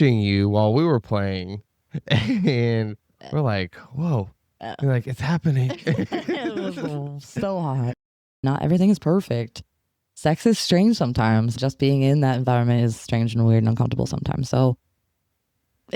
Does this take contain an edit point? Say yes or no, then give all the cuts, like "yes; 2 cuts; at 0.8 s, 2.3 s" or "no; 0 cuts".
yes; 1 cut; at 8.1 s